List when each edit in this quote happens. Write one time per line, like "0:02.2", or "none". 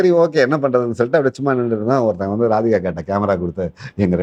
none